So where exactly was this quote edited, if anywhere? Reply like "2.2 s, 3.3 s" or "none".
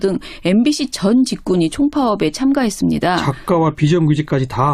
1.4 s